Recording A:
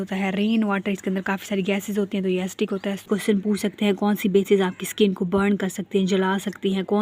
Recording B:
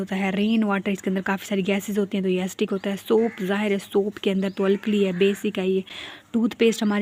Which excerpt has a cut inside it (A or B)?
A